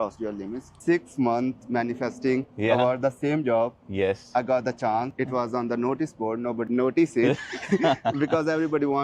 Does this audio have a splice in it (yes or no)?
yes